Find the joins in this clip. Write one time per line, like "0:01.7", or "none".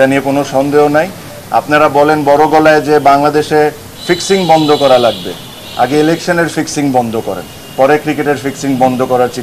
none